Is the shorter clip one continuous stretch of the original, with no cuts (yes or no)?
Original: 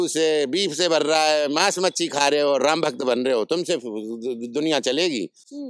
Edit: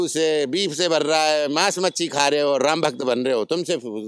yes